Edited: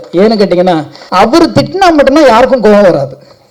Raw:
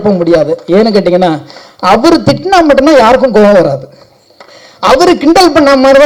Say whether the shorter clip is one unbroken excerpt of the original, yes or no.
no